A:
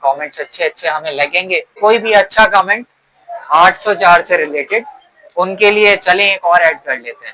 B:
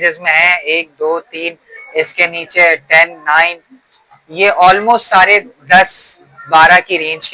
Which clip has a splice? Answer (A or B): A